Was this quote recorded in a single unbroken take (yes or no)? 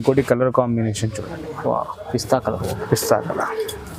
yes